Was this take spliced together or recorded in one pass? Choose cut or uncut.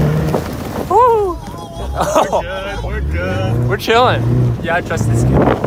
uncut